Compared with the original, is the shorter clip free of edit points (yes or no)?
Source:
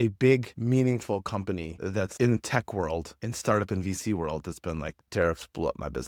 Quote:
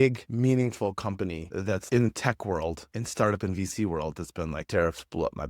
no